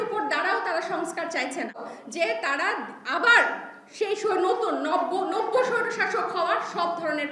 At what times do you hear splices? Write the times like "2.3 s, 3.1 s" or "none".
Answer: 1.9 s